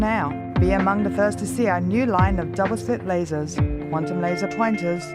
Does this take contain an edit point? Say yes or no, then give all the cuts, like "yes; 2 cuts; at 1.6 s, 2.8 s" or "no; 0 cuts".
yes; 1 cut; at 2.5 s